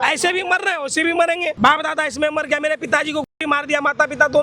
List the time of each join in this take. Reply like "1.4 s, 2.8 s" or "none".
1.6 s